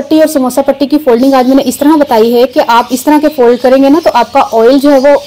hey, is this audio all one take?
yes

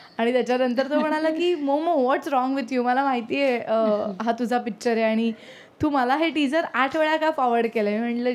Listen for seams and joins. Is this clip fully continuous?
yes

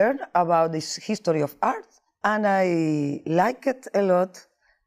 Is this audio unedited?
no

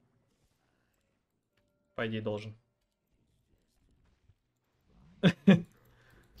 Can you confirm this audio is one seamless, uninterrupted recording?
no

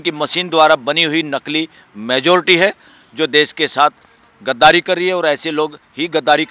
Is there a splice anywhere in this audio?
no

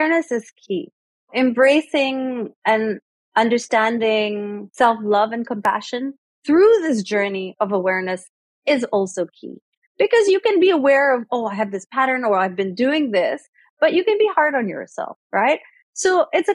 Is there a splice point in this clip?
yes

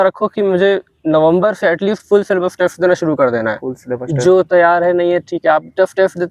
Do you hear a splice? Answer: no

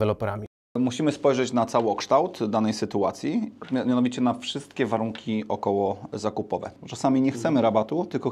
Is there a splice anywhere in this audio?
yes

